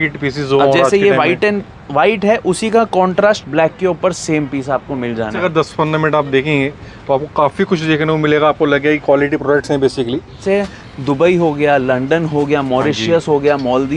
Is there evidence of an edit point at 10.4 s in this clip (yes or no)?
yes